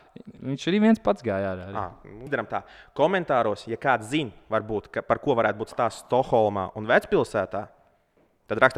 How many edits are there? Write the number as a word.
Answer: one